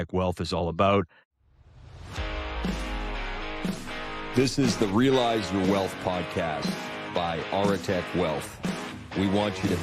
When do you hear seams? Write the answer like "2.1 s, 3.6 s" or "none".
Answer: 1.2 s